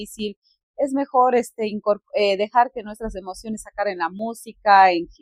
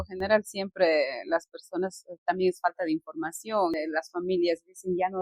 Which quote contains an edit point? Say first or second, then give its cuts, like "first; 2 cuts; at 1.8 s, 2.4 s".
second; 1 cut; at 3.8 s